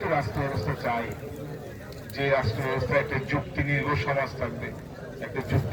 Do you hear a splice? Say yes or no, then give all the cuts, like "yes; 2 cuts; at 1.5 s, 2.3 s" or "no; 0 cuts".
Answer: no; 0 cuts